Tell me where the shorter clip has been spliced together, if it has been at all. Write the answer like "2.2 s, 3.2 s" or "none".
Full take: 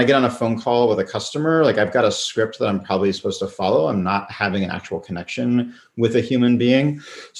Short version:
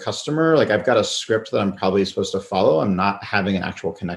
none